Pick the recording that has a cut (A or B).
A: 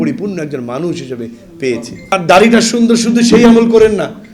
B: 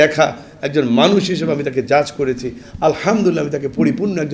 A